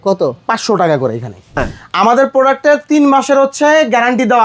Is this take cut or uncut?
cut